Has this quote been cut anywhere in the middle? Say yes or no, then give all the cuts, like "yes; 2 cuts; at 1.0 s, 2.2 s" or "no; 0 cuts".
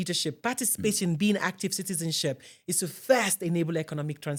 no; 0 cuts